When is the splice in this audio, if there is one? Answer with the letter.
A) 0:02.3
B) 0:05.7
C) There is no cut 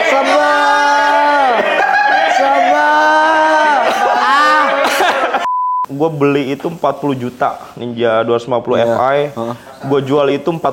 B